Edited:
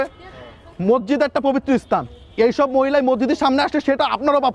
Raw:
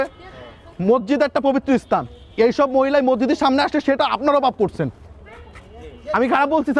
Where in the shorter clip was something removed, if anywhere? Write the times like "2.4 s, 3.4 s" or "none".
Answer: none

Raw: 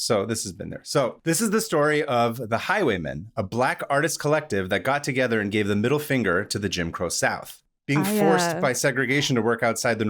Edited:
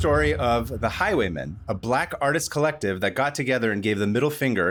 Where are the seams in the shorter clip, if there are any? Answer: none

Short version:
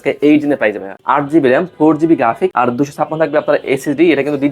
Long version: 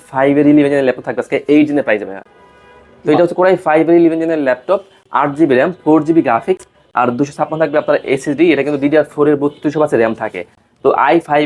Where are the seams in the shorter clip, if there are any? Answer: 0.9 s, 2.5 s

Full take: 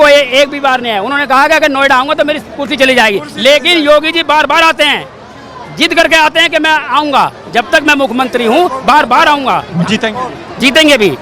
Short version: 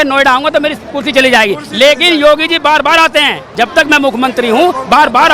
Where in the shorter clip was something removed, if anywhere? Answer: 3.5 s

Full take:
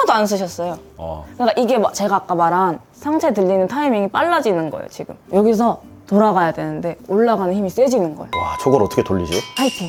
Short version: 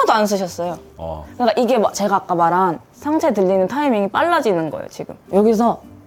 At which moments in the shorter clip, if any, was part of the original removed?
none

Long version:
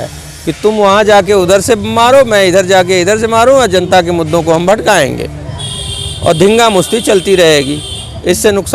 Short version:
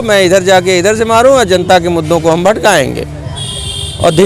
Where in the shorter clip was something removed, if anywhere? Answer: none

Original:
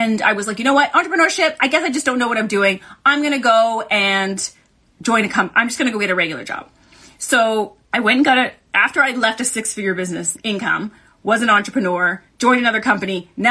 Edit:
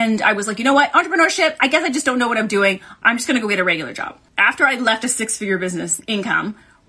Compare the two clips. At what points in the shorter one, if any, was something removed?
3.0 s, 4.3 s

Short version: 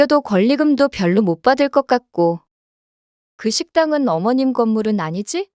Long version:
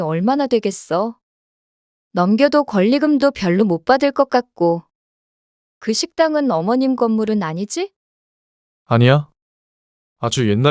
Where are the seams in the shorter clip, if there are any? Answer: none

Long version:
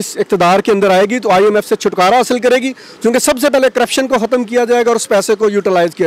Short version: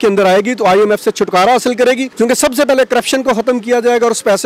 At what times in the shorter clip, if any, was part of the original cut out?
2.1 s

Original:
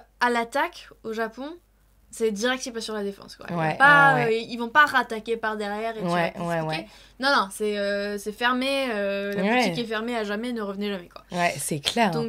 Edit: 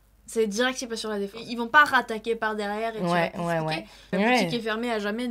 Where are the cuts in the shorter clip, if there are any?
1.5 s, 4.1 s

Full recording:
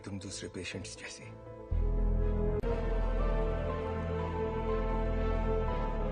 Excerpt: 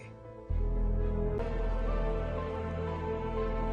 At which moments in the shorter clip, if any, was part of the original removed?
1.4 s

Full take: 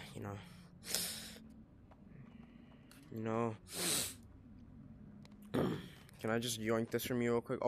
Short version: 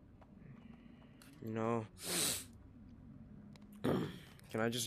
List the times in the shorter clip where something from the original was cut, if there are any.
none

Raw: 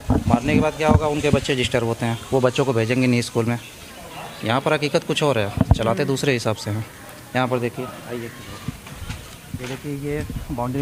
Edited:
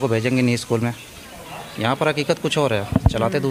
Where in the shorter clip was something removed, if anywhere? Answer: none

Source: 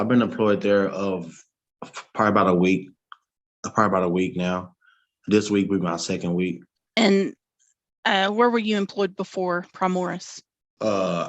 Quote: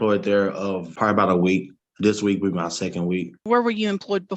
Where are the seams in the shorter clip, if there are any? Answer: 0.9 s, 1.8 s, 3.4 s

